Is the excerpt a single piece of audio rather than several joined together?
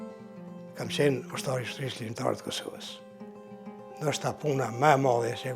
no; 2 cuts; at 2.7 s, 4.0 s

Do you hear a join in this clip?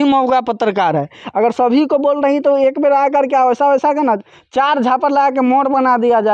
no; 0 cuts

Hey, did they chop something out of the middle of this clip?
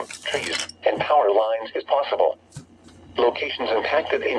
no; 0 cuts

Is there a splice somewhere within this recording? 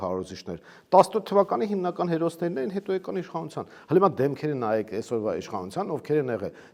no; 0 cuts

